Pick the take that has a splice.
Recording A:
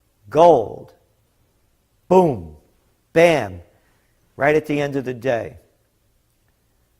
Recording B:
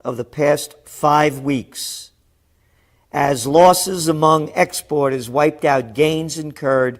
A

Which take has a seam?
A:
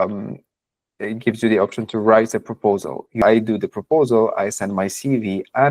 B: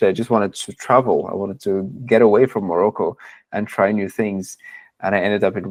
A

